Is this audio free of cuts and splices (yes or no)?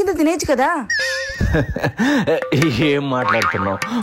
yes